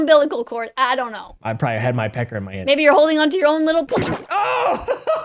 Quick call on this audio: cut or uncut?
uncut